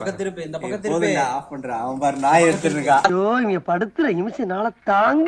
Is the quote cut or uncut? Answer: uncut